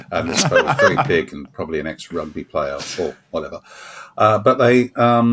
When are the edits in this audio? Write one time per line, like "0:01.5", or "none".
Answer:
none

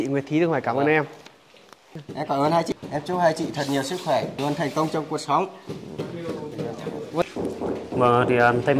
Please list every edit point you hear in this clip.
0:02.7
0:07.2

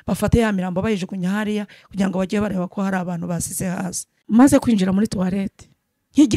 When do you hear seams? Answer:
0:04.1

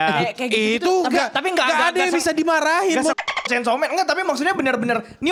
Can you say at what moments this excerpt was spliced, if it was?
none

